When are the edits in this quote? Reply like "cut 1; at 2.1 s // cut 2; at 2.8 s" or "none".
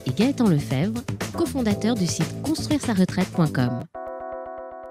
cut 1; at 4.0 s

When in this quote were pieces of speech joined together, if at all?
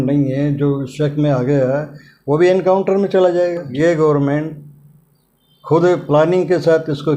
cut 1; at 3.7 s

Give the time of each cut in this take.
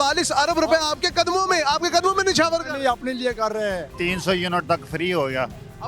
cut 1; at 4.0 s

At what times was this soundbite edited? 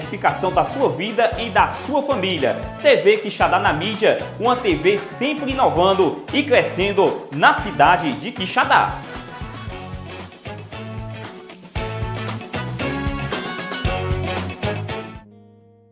cut 1; at 6.2 s // cut 2; at 15.1 s

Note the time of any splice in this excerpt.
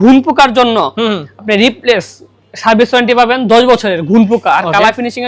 none

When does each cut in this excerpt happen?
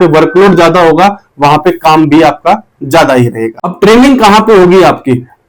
none

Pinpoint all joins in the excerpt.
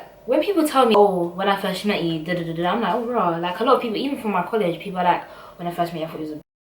cut 1; at 0.9 s

